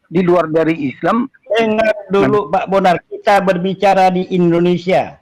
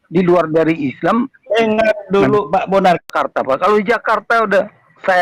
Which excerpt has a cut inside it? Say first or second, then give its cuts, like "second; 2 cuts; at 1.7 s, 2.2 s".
second; 1 cut; at 3.1 s